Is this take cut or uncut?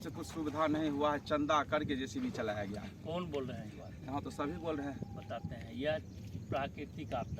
uncut